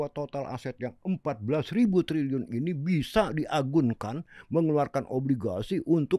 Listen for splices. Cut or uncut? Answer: uncut